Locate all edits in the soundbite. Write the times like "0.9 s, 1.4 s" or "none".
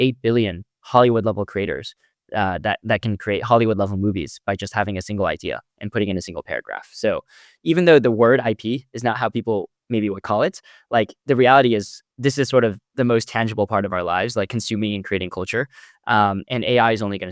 none